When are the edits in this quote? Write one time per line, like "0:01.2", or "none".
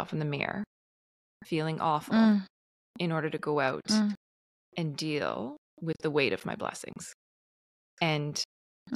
none